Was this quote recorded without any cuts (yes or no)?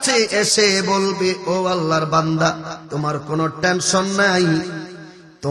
no